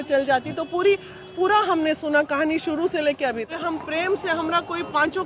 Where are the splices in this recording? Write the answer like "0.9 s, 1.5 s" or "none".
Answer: 3.5 s